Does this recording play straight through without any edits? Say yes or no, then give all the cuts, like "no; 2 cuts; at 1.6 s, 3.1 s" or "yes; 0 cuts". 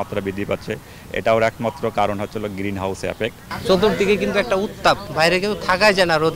no; 2 cuts; at 3.5 s, 5.1 s